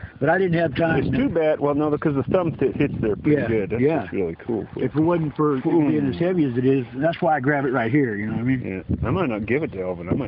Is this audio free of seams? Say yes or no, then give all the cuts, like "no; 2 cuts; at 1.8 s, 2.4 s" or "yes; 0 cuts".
yes; 0 cuts